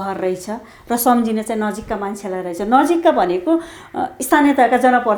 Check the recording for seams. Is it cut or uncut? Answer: uncut